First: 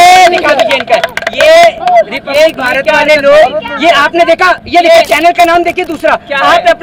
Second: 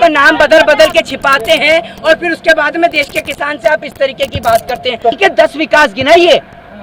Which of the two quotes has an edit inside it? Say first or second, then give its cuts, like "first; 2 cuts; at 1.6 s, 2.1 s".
second; 1 cut; at 5.1 s